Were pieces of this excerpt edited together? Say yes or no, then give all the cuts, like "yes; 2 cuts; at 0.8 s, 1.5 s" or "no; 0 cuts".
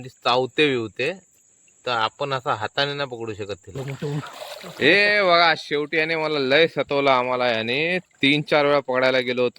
yes; 1 cut; at 3.7 s